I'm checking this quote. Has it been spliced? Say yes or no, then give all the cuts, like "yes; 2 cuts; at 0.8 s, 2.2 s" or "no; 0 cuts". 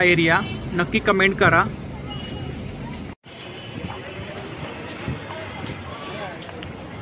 no; 0 cuts